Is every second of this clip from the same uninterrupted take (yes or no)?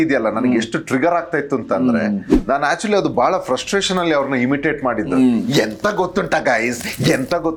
yes